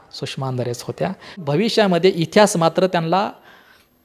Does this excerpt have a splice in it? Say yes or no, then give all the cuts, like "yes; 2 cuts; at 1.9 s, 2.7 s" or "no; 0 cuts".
yes; 1 cut; at 1.4 s